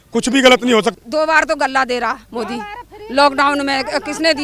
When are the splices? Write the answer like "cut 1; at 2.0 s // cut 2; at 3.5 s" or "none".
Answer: cut 1; at 0.9 s